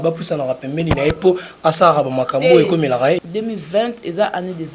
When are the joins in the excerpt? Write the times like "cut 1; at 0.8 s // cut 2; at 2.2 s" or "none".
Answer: cut 1; at 3.3 s